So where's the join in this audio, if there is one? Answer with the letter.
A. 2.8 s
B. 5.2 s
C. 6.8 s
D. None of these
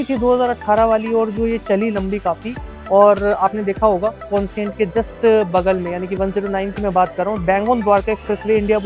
D